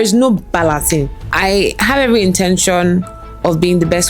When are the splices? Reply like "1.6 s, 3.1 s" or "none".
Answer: 1.2 s

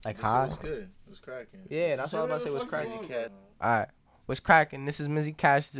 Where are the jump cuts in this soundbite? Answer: 3.4 s

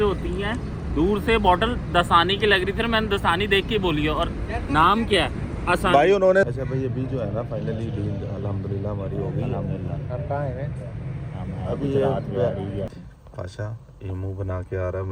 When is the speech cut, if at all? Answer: 6.5 s, 12.9 s

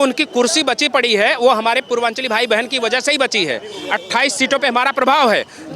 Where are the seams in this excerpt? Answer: none

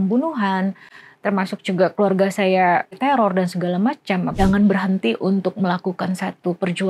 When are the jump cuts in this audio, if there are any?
2.9 s, 4.3 s

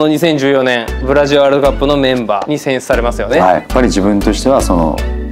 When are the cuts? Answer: 0.9 s, 3.7 s

